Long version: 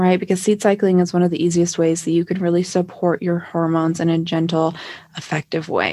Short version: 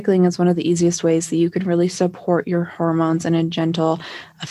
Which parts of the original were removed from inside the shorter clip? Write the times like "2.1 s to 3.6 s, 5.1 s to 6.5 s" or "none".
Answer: none